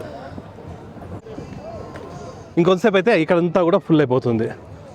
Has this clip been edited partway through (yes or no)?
no